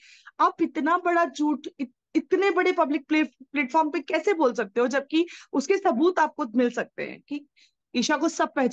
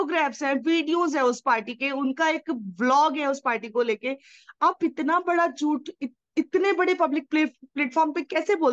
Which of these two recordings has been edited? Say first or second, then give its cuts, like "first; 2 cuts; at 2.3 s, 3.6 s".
first; 1 cut; at 7.7 s